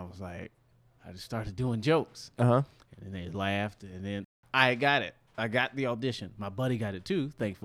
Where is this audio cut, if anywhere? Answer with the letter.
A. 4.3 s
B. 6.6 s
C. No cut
A